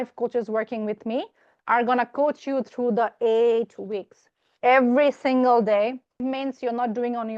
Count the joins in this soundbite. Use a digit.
2